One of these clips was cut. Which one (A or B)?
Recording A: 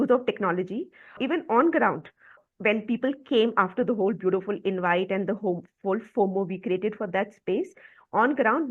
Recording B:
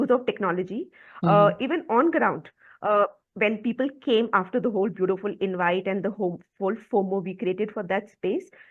A